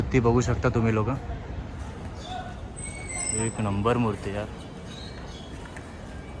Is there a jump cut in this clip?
no; 0 cuts

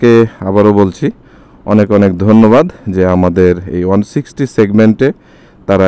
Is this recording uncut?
yes; 0 cuts

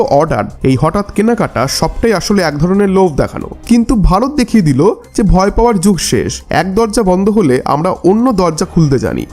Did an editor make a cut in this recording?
yes; 1 cut; at 3.5 s

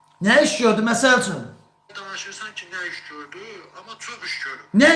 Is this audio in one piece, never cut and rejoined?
no; 1 cut; at 1.9 s

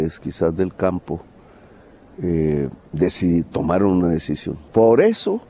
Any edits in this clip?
yes; 1 cut; at 4.5 s

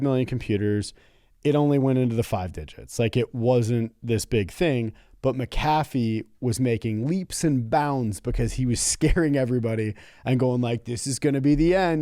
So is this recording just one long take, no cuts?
yes; 0 cuts

